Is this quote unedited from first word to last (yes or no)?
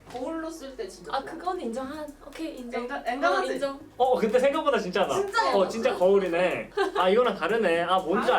yes